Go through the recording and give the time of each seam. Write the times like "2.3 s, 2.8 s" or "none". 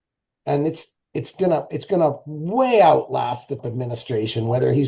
3.6 s

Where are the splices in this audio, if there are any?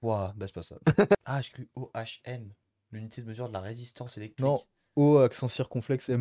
1.2 s

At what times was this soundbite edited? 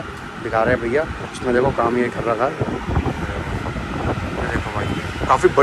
none

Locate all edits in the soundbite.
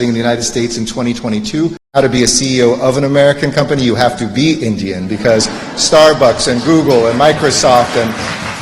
1.9 s

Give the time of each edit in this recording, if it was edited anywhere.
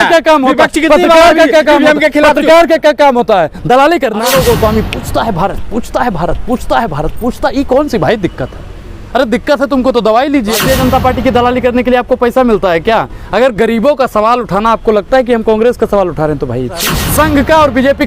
4.2 s, 10.6 s, 16.9 s

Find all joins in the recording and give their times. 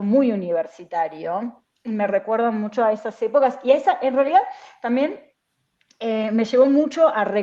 none

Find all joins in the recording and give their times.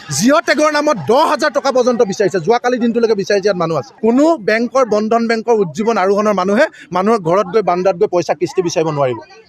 3.9 s

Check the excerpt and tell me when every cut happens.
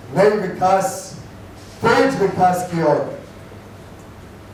none

